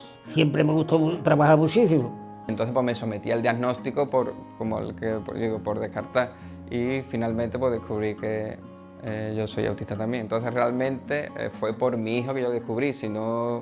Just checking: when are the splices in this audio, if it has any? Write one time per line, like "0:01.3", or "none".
0:02.5